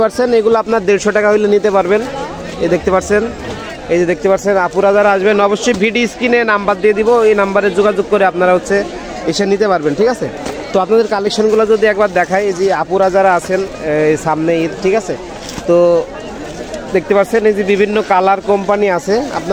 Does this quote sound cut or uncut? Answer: uncut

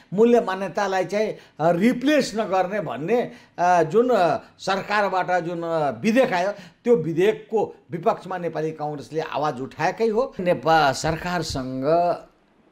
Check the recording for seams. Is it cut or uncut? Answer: cut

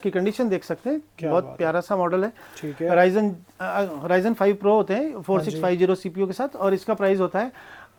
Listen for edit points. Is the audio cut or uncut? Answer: uncut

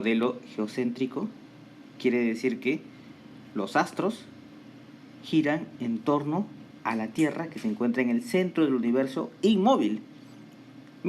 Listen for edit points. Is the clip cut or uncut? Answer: cut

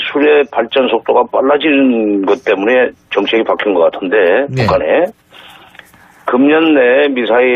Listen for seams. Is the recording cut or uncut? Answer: cut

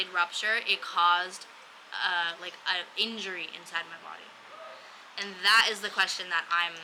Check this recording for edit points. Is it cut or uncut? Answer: uncut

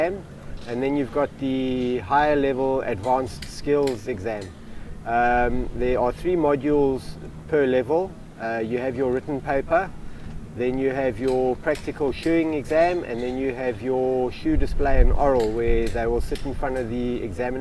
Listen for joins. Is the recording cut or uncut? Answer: uncut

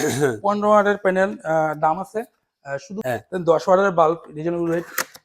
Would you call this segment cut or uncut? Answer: cut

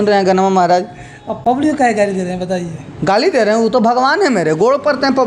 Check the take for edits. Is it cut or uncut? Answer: uncut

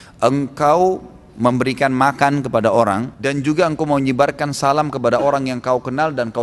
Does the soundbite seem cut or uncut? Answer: cut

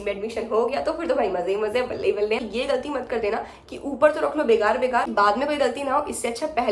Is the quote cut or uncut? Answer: cut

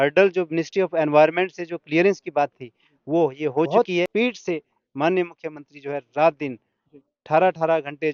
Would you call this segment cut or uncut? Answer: cut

